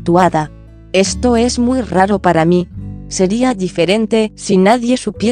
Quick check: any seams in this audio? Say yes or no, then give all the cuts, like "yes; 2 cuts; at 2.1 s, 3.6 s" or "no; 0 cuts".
no; 0 cuts